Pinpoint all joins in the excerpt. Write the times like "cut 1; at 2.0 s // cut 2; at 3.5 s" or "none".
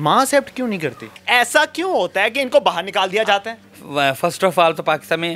cut 1; at 1.1 s // cut 2; at 3.5 s